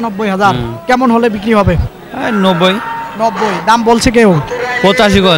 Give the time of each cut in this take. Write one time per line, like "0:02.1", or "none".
none